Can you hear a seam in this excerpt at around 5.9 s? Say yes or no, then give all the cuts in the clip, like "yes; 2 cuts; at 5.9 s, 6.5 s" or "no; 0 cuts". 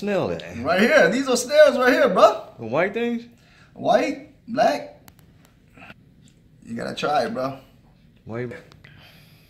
yes; 2 cuts; at 5.9 s, 8.6 s